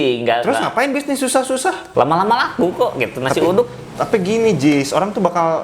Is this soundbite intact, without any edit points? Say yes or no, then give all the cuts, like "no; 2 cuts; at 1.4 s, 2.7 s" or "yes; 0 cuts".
no; 1 cut; at 1.8 s